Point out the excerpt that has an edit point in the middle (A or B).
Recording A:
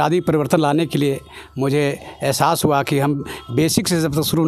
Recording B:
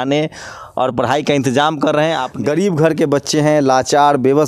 B